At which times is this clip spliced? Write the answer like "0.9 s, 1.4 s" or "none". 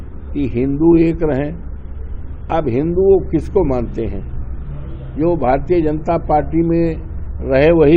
none